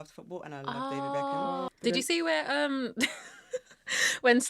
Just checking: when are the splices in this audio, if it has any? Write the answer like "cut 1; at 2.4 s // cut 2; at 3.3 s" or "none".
cut 1; at 1.7 s

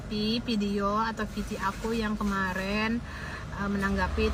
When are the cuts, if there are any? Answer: none

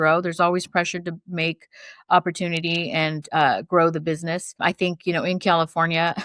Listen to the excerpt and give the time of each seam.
cut 1; at 4.6 s

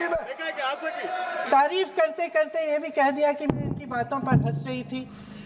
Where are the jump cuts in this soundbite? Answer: cut 1; at 1.4 s

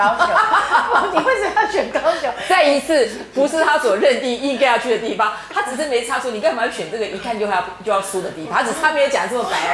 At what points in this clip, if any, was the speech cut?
none

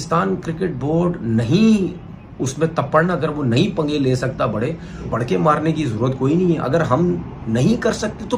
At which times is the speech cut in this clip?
cut 1; at 5.1 s

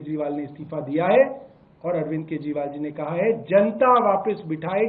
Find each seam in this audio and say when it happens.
none

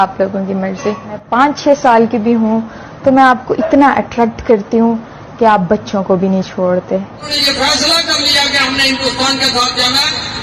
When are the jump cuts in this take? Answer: cut 1; at 1.2 s // cut 2; at 7.3 s

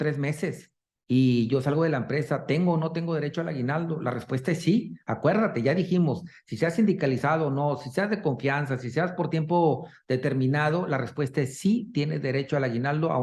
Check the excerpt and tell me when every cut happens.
none

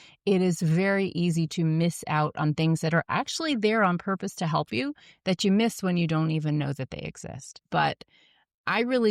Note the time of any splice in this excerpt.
cut 1; at 7.5 s

